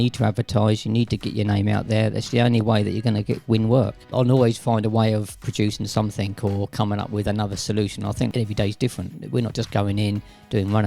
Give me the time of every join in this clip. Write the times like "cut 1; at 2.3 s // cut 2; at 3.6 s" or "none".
cut 1; at 4.1 s // cut 2; at 8.3 s